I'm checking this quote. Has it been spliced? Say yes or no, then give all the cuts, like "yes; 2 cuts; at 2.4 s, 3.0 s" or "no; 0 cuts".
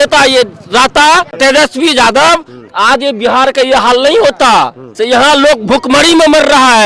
yes; 2 cuts; at 1.3 s, 4.8 s